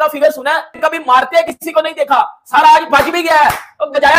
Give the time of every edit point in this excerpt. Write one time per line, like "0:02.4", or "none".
none